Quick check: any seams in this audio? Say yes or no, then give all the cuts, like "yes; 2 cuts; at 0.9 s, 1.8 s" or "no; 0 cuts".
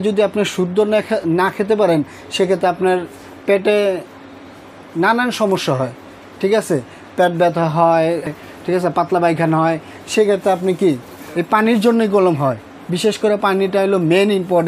no; 0 cuts